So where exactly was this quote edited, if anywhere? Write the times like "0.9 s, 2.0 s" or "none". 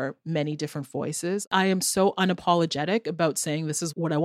1.5 s